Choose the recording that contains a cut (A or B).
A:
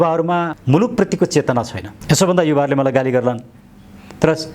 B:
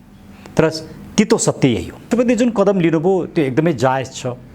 B